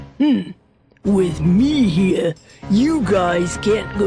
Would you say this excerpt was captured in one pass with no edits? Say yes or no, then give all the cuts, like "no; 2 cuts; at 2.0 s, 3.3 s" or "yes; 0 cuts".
yes; 0 cuts